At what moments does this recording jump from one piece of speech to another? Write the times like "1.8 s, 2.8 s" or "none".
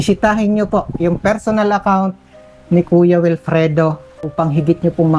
4.1 s